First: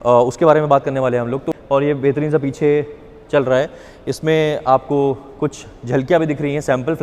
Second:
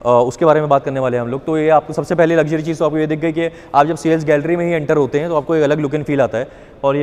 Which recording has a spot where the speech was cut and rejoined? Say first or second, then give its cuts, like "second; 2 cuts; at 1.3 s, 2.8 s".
first; 1 cut; at 1.4 s